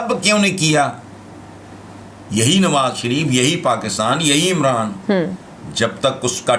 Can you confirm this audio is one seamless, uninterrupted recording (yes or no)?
yes